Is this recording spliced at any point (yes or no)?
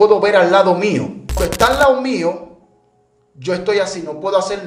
yes